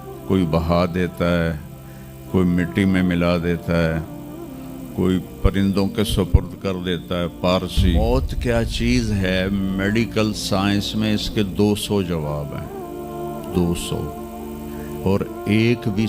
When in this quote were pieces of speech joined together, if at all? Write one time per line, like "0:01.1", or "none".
0:08.0